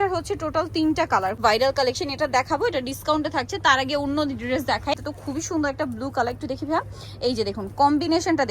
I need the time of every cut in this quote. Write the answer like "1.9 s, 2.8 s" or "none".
1.4 s, 5.1 s

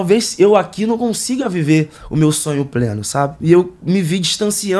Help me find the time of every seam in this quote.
3.4 s

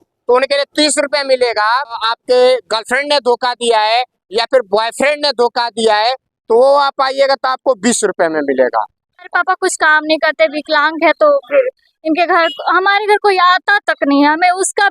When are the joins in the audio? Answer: 2.0 s, 9.2 s

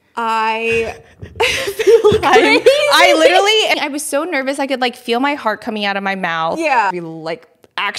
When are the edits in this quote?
3.7 s, 6.9 s

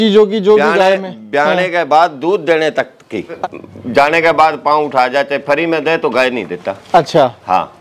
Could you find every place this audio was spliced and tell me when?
3.3 s

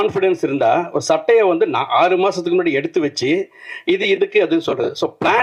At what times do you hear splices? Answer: none

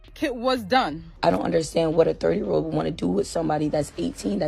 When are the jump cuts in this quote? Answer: 1.0 s

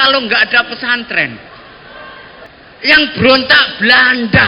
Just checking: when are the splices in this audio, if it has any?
2.5 s

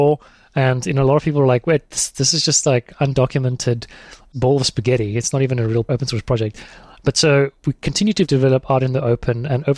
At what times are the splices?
8.3 s

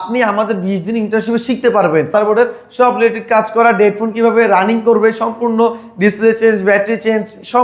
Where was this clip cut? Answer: 2.1 s

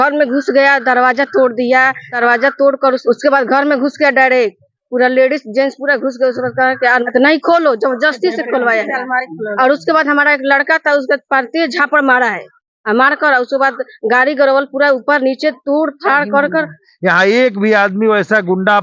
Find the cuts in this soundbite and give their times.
2.1 s, 3.0 s, 7.0 s, 16.8 s

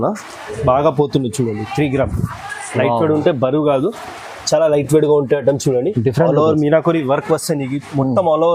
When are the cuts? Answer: none

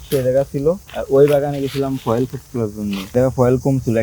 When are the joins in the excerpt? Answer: 0.9 s, 3.1 s

